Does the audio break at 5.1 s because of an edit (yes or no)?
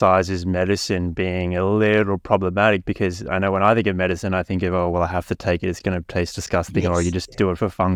no